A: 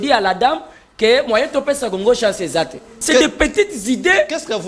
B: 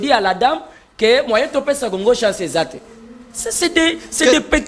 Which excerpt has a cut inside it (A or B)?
A